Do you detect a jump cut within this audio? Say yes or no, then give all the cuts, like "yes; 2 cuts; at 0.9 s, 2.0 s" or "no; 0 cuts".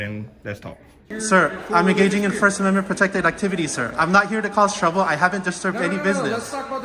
yes; 1 cut; at 1.1 s